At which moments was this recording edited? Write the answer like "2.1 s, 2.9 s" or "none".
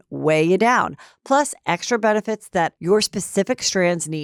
none